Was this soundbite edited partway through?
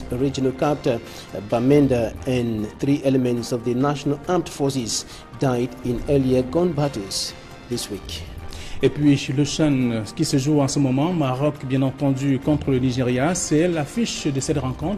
no; 0 cuts

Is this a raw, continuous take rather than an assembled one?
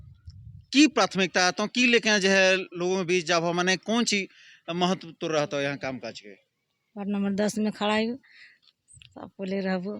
yes; 0 cuts

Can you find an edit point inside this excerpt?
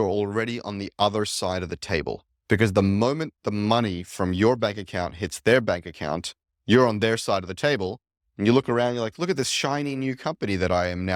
no; 0 cuts

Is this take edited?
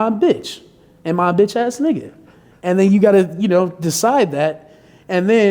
no; 0 cuts

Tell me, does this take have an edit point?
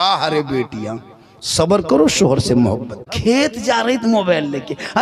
yes; 1 cut; at 3.1 s

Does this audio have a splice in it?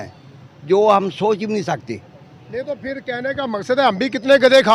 no; 0 cuts

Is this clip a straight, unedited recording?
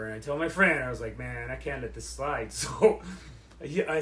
yes; 0 cuts

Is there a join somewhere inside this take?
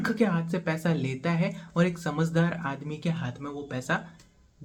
no; 0 cuts

